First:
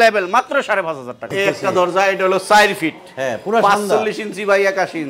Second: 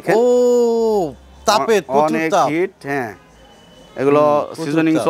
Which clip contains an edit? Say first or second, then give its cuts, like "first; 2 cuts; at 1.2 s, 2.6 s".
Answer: first; 1 cut; at 1.3 s